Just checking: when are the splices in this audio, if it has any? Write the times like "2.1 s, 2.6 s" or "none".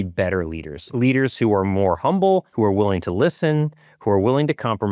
0.9 s, 2.5 s